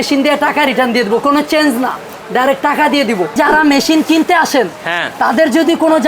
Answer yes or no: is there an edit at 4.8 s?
no